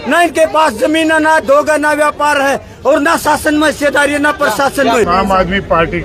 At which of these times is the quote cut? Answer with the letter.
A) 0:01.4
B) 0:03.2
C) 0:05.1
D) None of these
C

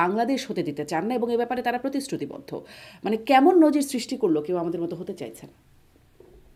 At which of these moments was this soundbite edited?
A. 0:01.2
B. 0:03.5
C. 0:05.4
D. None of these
D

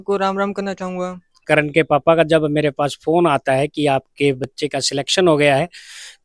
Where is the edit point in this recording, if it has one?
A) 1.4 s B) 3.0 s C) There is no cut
A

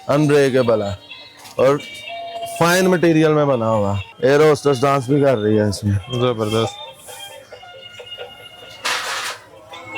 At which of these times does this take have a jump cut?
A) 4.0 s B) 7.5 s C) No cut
A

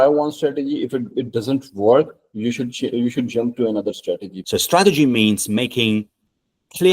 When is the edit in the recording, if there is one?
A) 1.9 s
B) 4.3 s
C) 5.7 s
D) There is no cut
B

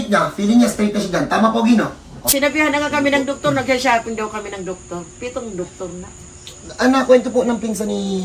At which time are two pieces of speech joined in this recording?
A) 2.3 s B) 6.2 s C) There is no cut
A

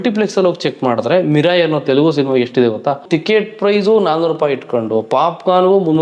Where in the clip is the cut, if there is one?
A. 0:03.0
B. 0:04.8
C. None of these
A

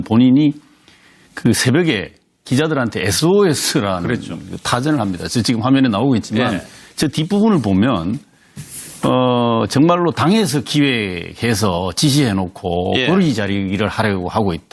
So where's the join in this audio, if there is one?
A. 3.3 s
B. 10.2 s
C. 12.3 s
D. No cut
C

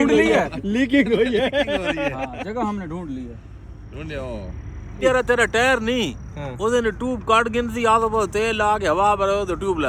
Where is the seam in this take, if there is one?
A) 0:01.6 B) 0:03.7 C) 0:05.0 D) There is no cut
C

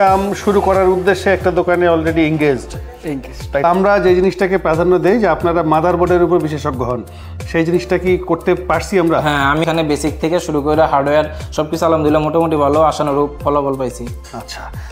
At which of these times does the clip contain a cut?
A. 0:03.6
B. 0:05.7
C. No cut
A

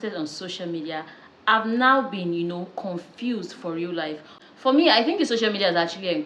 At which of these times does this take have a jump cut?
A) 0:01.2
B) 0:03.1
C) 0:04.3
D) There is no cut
C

